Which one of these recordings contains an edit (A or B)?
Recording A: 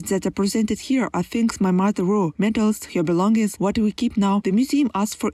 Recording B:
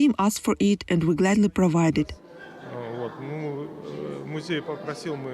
B